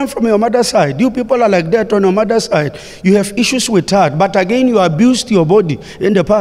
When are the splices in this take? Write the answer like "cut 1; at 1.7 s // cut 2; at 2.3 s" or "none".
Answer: cut 1; at 2.8 s